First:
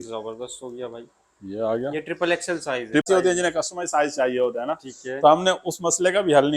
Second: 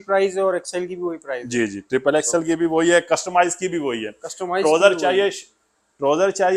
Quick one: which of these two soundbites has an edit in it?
first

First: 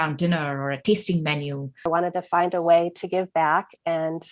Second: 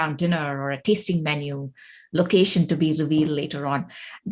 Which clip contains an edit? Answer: first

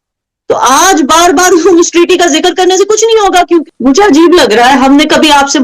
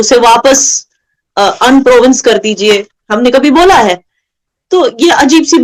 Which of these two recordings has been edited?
first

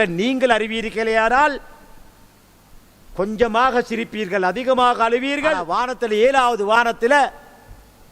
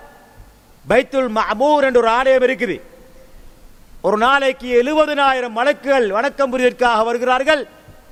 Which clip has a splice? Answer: first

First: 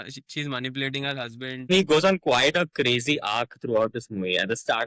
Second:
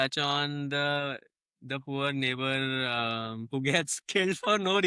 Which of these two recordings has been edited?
first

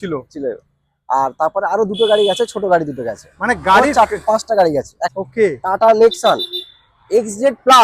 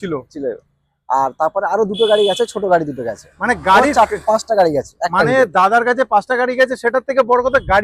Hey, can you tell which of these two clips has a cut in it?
first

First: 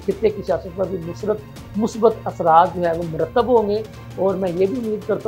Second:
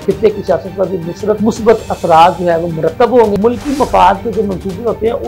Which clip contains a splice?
second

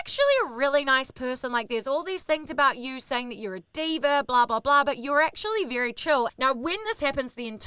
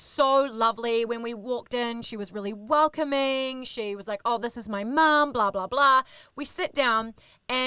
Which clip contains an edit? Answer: first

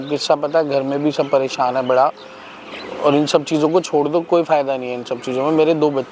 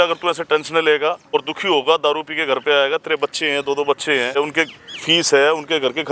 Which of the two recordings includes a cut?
second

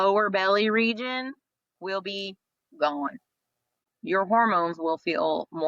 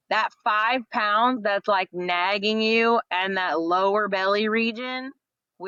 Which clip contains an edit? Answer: first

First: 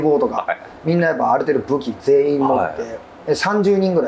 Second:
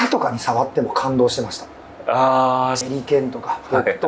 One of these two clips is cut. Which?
second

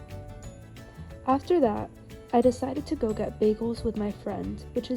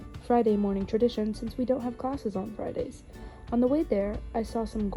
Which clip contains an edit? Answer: first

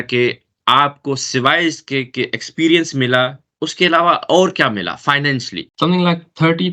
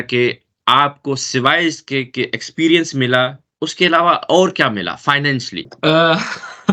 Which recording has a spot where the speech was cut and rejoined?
first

